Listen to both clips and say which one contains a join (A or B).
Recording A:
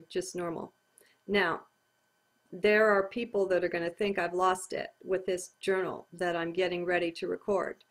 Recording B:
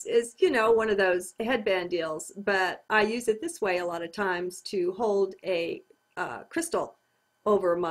A